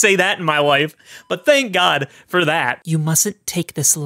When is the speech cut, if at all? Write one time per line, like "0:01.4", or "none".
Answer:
0:02.8

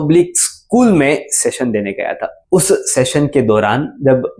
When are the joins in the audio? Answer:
0:02.3

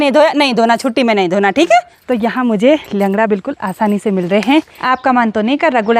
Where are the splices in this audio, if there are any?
0:02.0
0:04.8

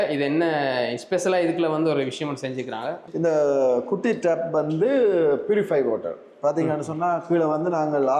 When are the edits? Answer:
none

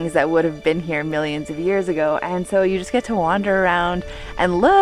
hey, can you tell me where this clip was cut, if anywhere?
none

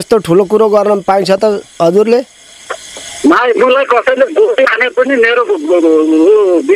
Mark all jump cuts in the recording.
none

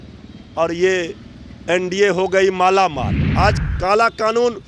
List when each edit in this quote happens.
0:03.2

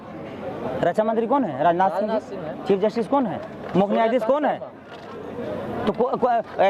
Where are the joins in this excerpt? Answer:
none

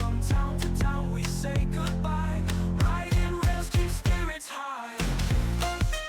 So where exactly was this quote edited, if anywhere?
0:05.2

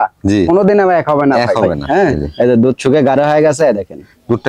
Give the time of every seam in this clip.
0:01.7

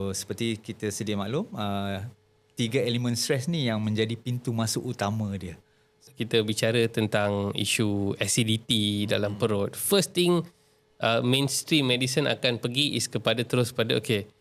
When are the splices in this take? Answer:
0:06.0

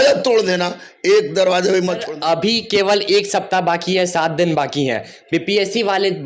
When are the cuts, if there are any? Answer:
0:02.1

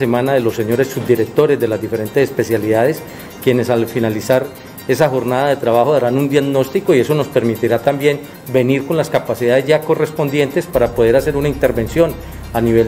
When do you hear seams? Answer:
none

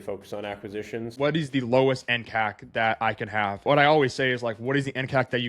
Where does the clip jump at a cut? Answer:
0:01.1
0:03.6

